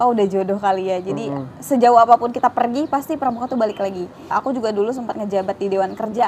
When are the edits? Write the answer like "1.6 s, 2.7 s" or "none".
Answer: none